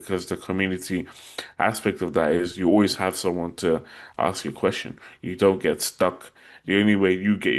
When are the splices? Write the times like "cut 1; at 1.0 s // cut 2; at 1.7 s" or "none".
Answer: none